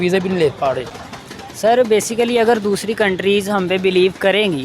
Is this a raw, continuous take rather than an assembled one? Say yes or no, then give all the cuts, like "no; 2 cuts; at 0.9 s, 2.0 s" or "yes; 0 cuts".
yes; 0 cuts